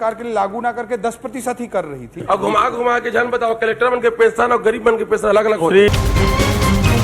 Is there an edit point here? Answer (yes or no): yes